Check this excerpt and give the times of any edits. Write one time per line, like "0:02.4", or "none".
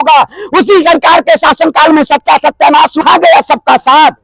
0:03.0

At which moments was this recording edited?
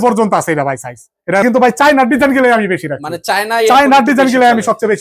0:01.4

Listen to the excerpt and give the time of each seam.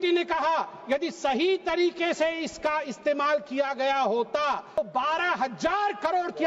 0:04.8

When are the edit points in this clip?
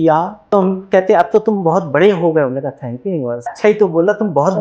0:03.5

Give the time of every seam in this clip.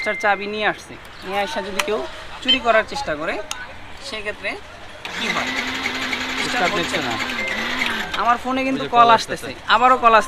none

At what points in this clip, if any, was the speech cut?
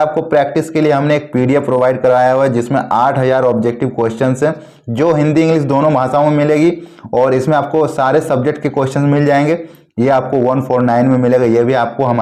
none

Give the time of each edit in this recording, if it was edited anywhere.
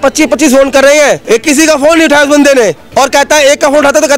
0:01.2
0:02.8

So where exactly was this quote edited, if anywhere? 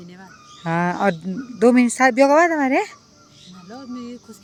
none

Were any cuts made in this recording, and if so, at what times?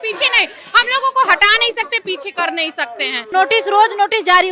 0:03.3

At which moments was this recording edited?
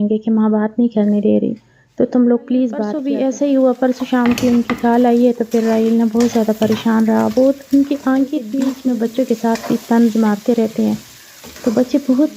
0:02.9
0:08.7

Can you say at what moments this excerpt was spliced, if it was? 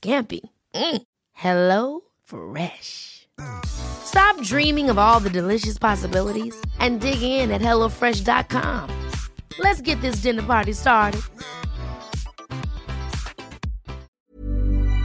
0:14.1

